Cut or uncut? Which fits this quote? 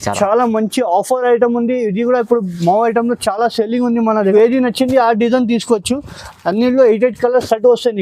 cut